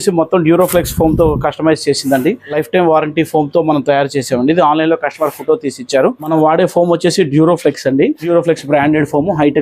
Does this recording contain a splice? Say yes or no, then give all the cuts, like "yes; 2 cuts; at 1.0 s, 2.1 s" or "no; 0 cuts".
yes; 3 cuts; at 2.5 s, 6.2 s, 8.2 s